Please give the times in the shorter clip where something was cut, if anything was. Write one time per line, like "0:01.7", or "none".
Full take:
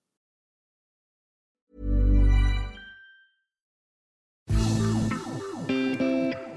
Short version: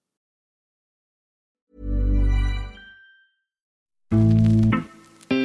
0:04.1